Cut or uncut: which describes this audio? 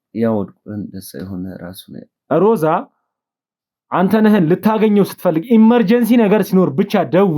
cut